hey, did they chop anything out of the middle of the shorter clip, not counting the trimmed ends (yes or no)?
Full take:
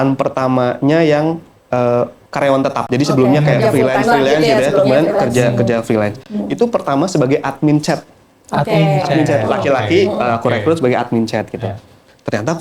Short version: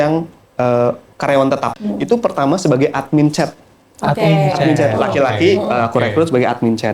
yes